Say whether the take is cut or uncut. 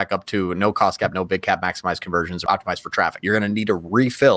cut